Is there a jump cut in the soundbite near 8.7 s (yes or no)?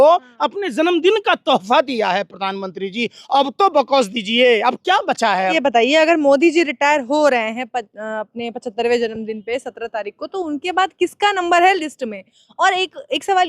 no